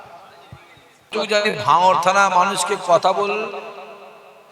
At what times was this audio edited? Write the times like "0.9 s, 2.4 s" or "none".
1.1 s

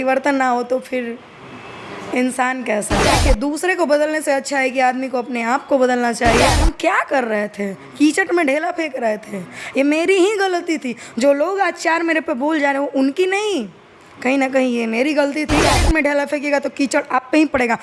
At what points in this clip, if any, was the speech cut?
3.2 s, 6.6 s, 15.8 s

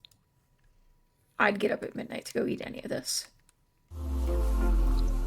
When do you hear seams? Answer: 4.1 s

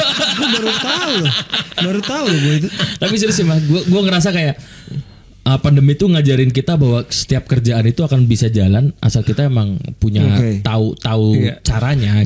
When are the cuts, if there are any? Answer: 2.6 s

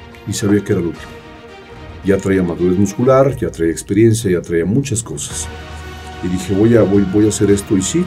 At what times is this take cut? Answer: none

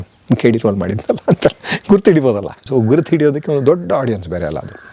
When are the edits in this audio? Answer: 2.7 s

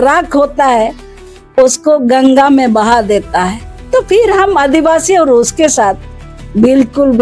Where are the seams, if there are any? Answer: none

